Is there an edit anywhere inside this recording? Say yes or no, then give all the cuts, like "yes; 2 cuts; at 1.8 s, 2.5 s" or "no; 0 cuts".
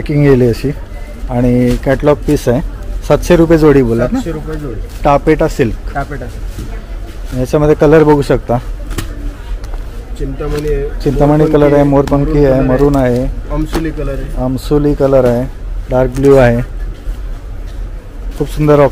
no; 0 cuts